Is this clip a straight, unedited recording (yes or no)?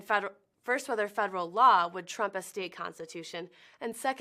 no